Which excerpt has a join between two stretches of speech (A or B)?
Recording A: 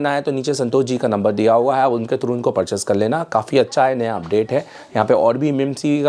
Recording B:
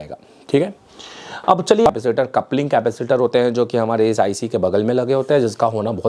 B